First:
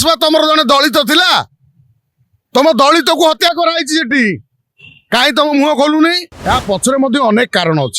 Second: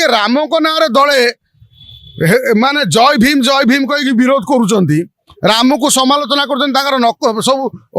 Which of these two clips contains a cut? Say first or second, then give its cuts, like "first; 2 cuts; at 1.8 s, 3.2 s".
first; 1 cut; at 6.3 s